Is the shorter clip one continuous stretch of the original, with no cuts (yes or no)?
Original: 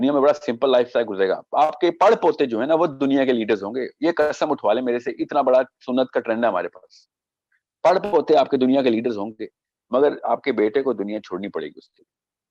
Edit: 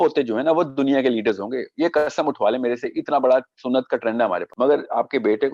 no